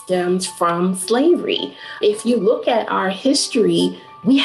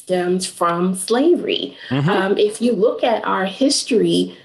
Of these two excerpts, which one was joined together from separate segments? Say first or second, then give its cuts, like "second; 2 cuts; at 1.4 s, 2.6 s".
first; 1 cut; at 2.0 s